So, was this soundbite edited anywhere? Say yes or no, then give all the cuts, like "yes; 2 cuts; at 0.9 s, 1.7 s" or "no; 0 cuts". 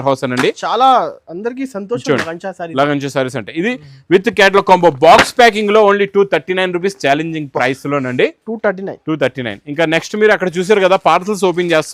no; 0 cuts